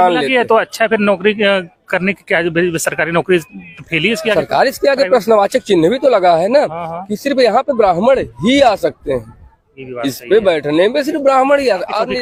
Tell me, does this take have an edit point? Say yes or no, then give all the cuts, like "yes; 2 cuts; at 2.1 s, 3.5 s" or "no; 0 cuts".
no; 0 cuts